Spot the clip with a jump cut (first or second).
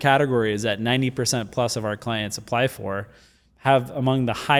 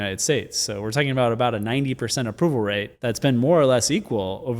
second